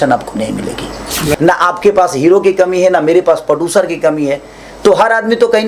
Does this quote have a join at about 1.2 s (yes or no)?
yes